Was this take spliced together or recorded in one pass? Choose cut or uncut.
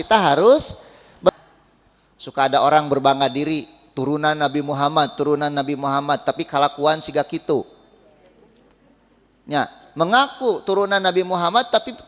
cut